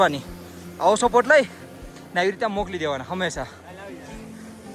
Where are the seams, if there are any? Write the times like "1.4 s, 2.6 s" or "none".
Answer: none